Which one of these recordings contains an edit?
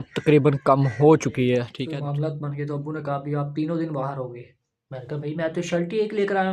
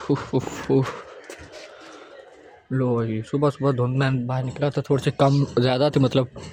first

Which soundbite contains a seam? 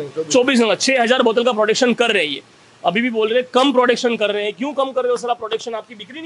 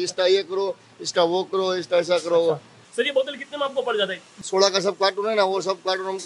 second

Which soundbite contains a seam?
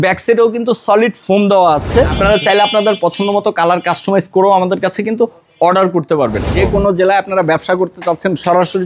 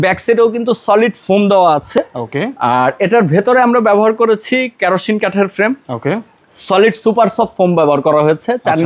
first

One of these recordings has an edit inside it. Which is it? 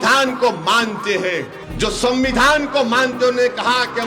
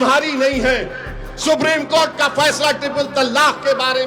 first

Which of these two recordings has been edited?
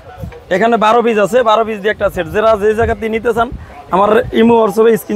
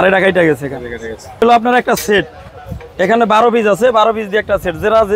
second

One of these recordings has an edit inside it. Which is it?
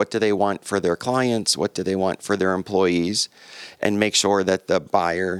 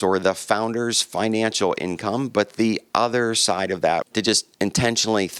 second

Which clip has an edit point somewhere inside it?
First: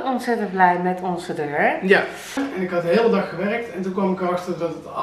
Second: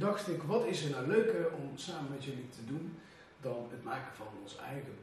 first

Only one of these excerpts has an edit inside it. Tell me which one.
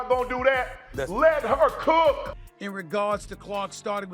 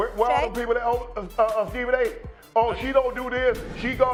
first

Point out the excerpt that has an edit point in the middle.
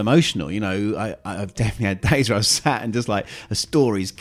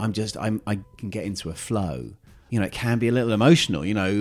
second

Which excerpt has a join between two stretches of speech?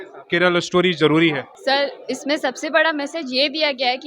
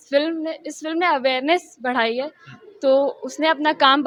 first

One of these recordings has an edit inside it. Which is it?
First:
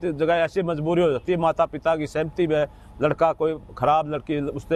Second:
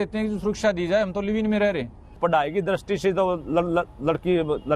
second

